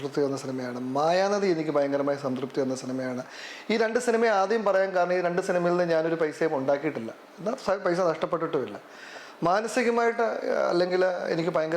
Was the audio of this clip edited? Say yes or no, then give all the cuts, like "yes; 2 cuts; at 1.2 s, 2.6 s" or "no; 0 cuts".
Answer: no; 0 cuts